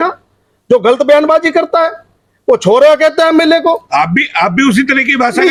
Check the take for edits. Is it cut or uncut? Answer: uncut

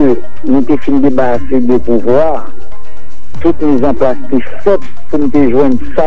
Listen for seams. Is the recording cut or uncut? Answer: uncut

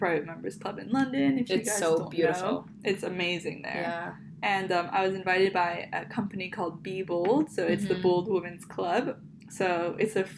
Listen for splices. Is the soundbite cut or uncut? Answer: uncut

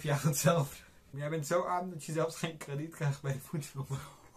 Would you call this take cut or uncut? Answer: cut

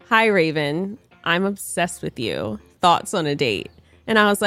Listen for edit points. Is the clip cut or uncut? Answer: cut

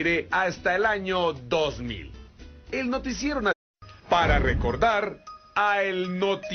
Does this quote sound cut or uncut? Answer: uncut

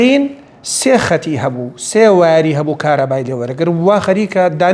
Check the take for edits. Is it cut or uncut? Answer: uncut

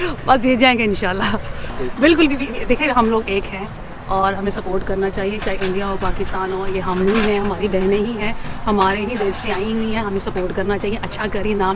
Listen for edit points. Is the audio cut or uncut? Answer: uncut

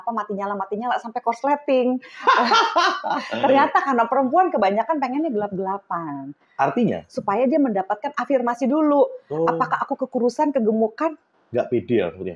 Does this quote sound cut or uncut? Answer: uncut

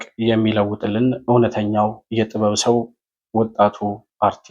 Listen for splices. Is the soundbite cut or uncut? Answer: uncut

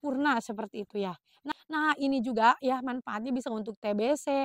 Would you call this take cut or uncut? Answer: cut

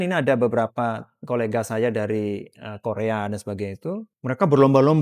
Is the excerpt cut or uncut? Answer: cut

